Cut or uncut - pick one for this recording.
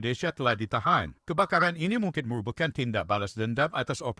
uncut